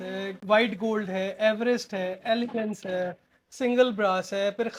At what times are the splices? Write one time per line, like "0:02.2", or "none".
none